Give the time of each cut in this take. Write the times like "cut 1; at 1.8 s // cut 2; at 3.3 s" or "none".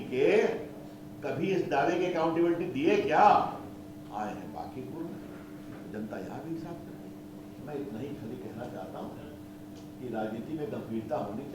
none